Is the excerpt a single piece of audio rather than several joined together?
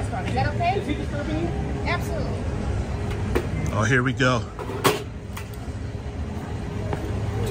yes; 0 cuts

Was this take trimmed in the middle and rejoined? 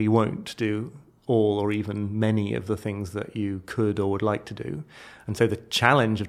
no; 0 cuts

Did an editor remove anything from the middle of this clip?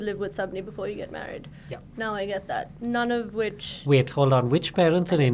no; 0 cuts

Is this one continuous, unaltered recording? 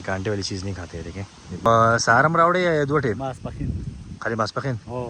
no; 1 cut; at 1.7 s

